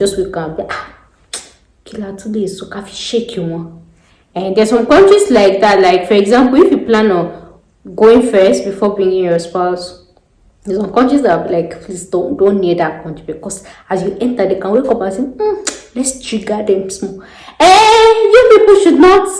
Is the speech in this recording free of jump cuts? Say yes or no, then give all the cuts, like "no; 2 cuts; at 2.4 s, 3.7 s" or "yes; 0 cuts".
yes; 0 cuts